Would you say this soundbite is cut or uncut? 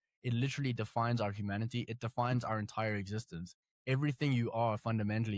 uncut